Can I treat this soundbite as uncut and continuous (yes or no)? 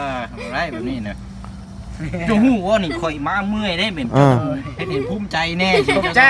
yes